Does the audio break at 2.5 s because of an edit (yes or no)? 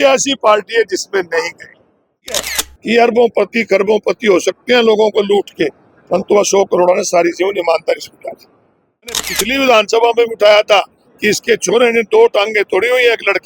yes